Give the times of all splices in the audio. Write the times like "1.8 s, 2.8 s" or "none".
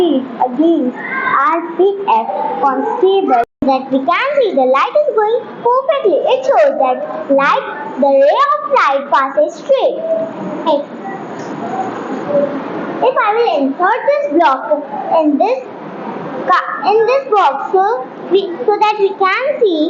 3.5 s